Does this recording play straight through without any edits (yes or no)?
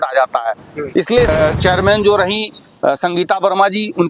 no